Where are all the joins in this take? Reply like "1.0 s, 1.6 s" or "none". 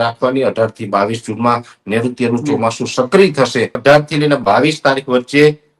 3.8 s